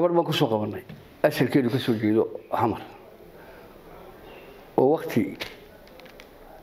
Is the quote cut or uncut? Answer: uncut